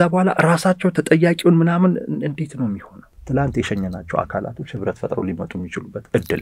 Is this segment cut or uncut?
cut